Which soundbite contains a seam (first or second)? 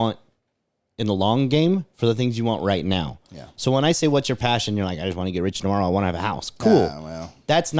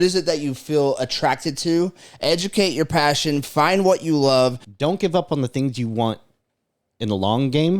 second